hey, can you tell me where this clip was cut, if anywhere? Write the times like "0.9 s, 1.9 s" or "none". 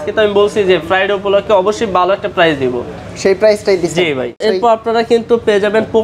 none